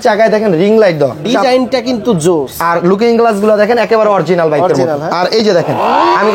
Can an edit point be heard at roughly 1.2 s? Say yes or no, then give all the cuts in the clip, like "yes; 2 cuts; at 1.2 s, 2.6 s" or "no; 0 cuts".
yes; 1 cut; at 1.2 s